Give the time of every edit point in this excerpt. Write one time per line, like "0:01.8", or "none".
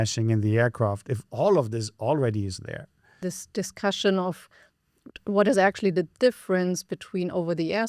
none